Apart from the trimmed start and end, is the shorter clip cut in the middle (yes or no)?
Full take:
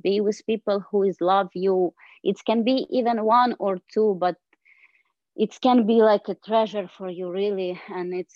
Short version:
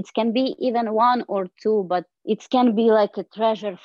yes